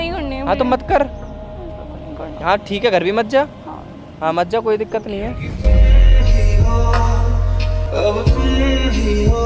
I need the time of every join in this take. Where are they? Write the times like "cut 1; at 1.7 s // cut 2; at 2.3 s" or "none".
none